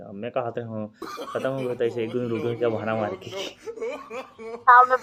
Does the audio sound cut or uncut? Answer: uncut